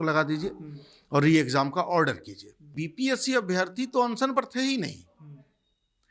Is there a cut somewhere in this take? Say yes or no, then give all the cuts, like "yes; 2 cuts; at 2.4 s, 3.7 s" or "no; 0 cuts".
yes; 1 cut; at 2.8 s